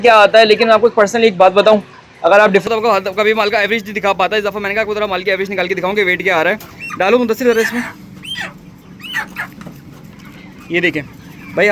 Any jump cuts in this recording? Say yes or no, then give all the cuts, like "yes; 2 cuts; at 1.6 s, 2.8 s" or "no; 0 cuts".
yes; 1 cut; at 2.6 s